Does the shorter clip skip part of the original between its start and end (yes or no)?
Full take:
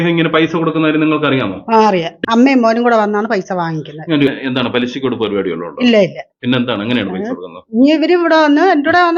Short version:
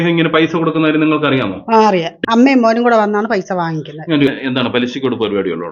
no